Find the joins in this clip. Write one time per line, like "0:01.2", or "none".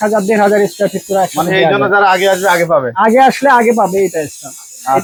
none